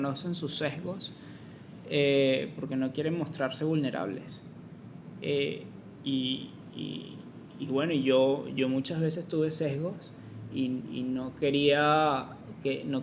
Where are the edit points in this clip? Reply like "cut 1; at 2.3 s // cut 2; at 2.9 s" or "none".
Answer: none